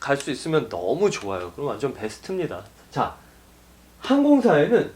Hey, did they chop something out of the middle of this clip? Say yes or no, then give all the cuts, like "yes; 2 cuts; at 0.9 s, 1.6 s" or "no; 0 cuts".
yes; 1 cut; at 2.7 s